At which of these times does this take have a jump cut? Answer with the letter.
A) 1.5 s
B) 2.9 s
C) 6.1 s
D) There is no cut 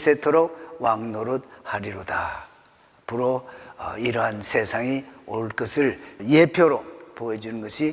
C